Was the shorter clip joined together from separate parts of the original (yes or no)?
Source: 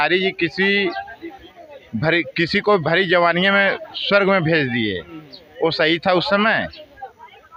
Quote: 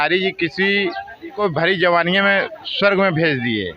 yes